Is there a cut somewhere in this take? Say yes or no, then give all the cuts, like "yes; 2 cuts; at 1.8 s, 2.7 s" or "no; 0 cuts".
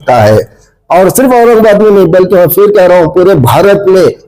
no; 0 cuts